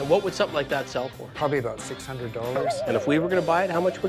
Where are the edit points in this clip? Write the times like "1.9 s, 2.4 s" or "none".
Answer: 1.2 s, 2.7 s